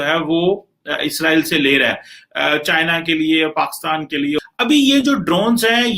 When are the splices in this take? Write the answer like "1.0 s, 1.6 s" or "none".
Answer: 4.4 s